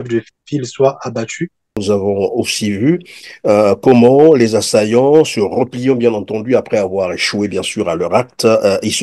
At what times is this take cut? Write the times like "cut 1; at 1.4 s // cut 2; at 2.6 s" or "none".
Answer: cut 1; at 1.7 s